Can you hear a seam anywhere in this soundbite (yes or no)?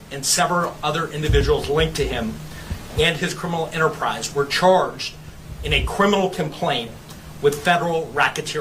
no